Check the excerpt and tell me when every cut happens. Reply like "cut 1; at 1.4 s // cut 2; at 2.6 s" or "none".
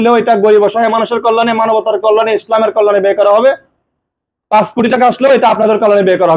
none